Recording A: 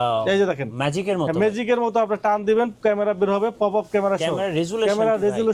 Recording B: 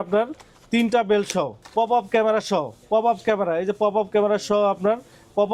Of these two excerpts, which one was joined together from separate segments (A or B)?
B